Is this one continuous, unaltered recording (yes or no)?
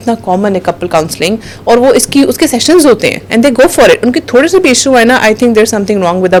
yes